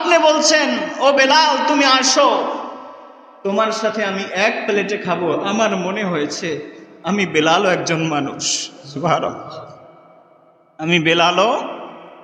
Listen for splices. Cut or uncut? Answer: uncut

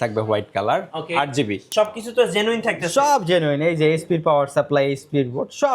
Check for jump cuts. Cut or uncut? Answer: cut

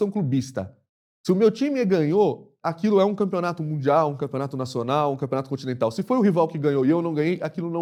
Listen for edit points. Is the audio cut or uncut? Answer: uncut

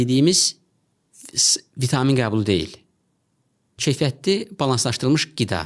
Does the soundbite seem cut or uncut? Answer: uncut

